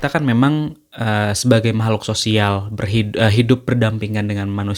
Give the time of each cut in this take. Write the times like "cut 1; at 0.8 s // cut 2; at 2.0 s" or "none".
none

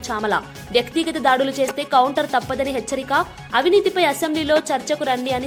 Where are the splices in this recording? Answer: none

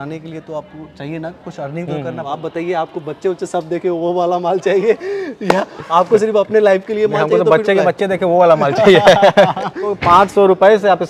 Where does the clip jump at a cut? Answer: cut 1; at 2.2 s // cut 2; at 10.0 s

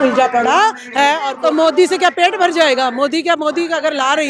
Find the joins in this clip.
cut 1; at 1.3 s

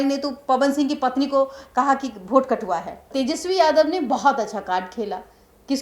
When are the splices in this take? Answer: cut 1; at 3.0 s

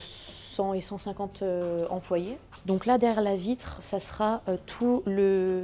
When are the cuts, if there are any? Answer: cut 1; at 2.5 s

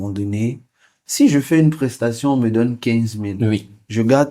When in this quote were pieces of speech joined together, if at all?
cut 1; at 1.0 s

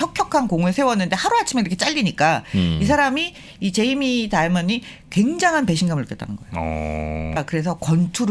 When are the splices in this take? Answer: cut 1; at 7.4 s

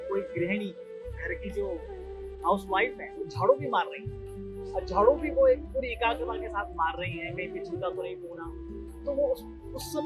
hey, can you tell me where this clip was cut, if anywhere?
none

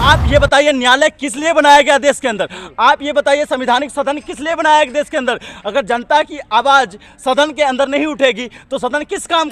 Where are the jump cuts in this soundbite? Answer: none

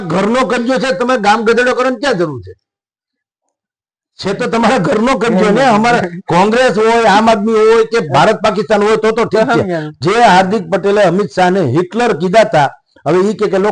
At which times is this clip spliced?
cut 1; at 9.9 s

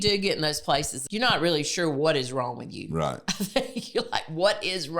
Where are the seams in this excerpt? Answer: cut 1; at 0.9 s

